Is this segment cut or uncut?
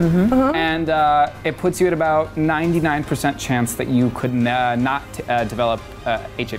uncut